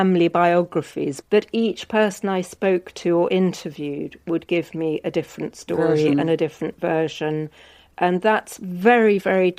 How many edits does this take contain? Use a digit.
1